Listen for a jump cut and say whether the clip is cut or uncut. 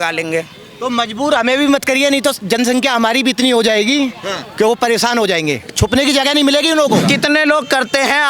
cut